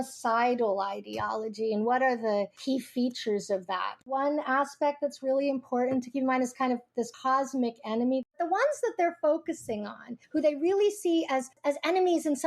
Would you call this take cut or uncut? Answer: cut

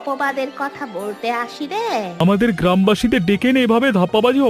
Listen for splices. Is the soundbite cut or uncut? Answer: cut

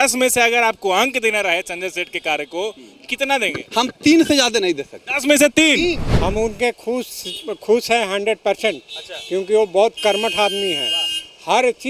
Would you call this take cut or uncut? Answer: cut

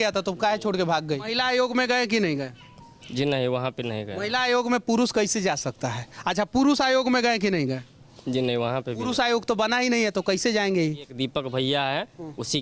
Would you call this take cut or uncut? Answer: cut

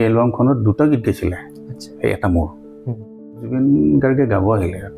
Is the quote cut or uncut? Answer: cut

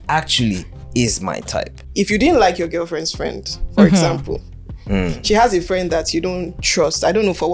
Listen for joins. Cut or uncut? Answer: cut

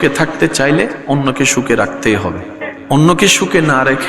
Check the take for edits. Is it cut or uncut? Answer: cut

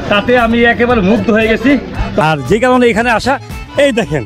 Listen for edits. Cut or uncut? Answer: cut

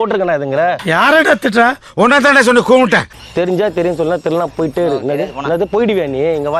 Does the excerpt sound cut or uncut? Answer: cut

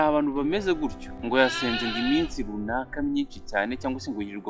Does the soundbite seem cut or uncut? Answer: cut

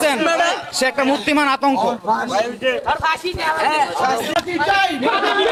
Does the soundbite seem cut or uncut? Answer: uncut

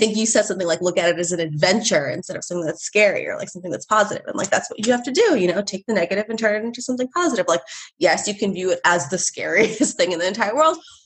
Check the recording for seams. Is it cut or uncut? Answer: uncut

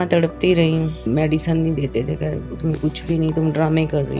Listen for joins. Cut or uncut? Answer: cut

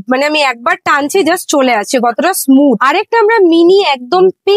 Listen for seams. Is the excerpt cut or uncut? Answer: uncut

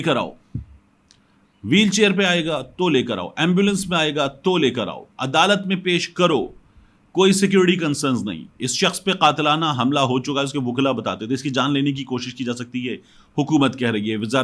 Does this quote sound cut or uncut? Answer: uncut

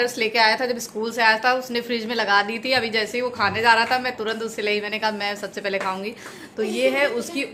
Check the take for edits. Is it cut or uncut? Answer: uncut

